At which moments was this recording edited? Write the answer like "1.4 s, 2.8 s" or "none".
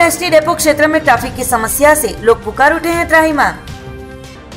none